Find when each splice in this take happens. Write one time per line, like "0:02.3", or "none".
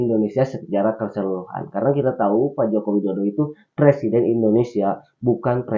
none